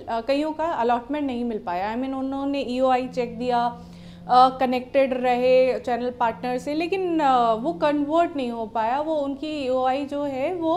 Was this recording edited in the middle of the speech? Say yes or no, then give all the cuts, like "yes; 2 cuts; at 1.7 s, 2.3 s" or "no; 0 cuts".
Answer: no; 0 cuts